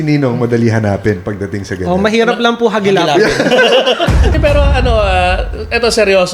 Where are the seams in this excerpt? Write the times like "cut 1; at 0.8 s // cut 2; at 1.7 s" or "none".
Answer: cut 1; at 4.2 s